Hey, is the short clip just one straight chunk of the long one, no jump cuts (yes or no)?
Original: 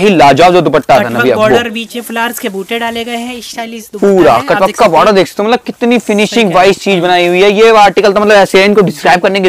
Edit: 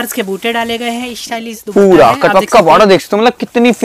yes